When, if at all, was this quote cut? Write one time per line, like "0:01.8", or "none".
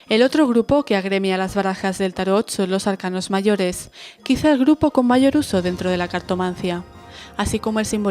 0:04.4